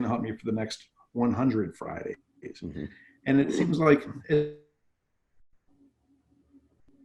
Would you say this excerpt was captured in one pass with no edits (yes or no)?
yes